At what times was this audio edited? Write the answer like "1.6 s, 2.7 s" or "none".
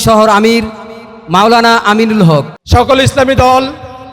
2.6 s